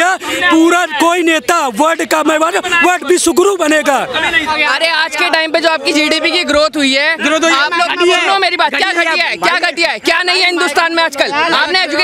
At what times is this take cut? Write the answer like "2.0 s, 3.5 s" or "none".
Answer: 4.5 s